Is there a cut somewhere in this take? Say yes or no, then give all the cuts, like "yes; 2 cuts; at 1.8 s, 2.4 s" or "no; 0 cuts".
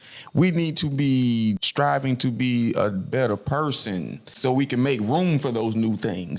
yes; 2 cuts; at 1.7 s, 4.3 s